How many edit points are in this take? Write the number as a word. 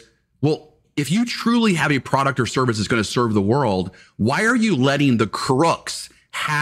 one